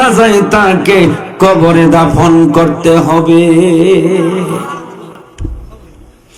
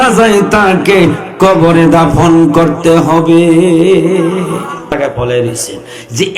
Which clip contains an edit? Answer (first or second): second